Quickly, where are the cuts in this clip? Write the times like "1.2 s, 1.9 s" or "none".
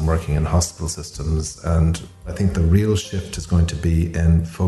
2.3 s